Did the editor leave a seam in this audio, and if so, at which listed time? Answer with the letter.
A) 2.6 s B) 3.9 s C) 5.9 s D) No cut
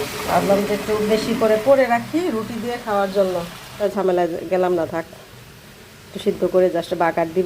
B